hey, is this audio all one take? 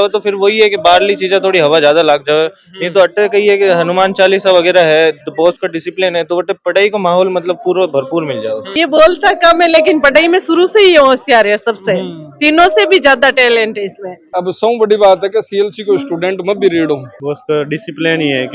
no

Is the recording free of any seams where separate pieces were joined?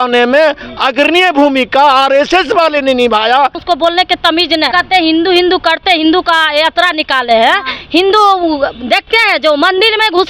no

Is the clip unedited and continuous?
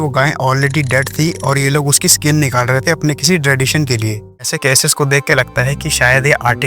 no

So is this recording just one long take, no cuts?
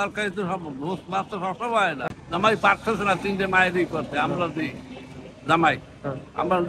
no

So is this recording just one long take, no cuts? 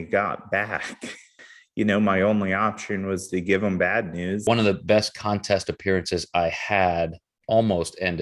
no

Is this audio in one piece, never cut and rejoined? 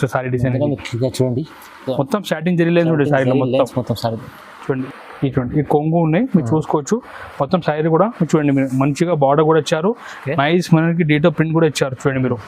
no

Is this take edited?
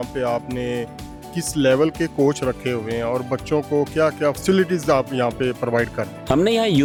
no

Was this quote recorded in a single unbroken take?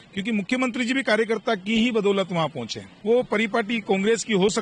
no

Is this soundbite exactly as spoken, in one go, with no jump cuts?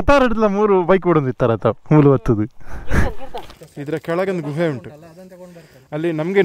no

